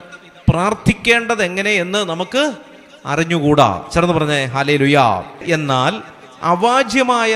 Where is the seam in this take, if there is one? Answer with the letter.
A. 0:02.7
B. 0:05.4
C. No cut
B